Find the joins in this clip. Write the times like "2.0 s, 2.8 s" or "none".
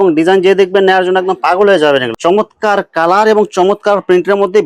2.1 s